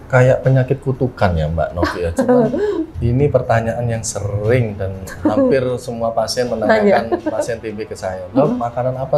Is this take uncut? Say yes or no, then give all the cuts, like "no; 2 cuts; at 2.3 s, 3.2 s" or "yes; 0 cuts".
no; 1 cut; at 2.9 s